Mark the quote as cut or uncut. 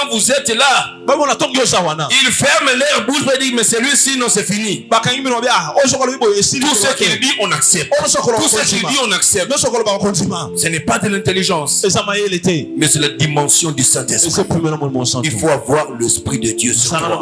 uncut